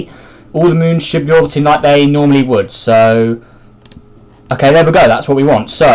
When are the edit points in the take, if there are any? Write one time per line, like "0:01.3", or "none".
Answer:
0:02.1